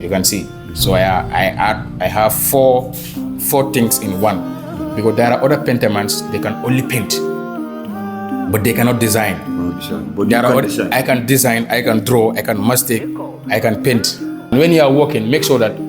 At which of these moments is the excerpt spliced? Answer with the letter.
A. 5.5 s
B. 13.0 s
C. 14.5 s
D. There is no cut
C